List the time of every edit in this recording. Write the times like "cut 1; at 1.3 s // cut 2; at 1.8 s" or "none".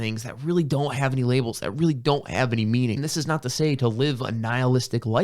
cut 1; at 3.0 s

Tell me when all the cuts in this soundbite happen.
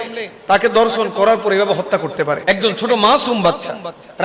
cut 1; at 2.4 s

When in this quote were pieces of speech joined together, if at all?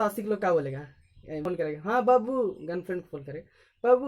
cut 1; at 1.4 s

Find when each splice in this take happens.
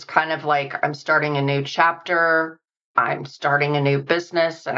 cut 1; at 2.9 s

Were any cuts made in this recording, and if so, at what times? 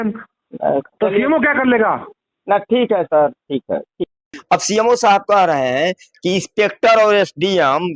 cut 1; at 4.3 s

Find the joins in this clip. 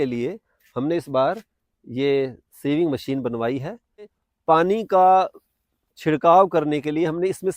cut 1; at 4.2 s

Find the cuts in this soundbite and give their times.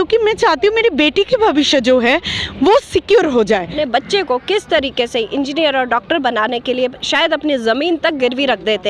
cut 1; at 3.7 s

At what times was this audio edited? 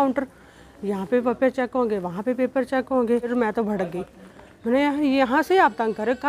cut 1; at 3.3 s

